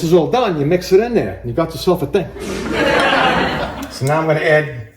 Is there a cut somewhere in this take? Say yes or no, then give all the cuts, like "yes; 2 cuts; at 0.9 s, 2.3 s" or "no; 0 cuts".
yes; 1 cut; at 3.7 s